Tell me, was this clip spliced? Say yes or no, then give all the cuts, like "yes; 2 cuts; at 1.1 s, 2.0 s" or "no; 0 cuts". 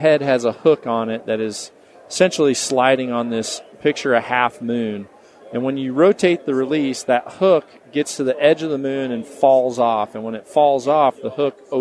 no; 0 cuts